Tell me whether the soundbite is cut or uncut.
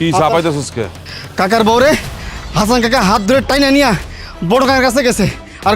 cut